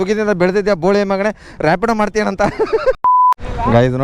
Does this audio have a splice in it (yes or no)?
yes